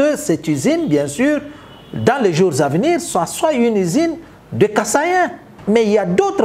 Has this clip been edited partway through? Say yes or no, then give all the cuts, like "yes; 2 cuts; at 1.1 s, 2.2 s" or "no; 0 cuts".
yes; 1 cut; at 5.5 s